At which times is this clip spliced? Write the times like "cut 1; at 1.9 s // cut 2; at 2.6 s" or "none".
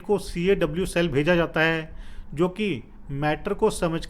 none